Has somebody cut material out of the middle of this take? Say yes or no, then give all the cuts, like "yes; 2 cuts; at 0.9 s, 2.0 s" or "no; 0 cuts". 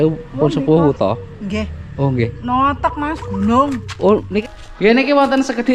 yes; 1 cut; at 4.4 s